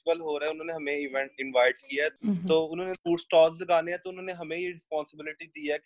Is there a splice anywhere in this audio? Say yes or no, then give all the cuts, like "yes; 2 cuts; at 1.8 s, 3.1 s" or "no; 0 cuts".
yes; 2 cuts; at 2.1 s, 3.0 s